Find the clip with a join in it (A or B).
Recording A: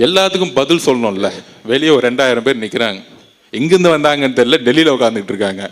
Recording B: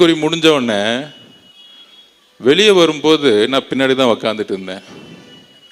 A